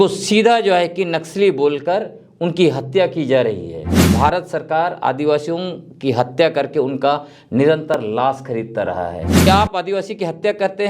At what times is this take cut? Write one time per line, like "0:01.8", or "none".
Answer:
0:04.1
0:09.5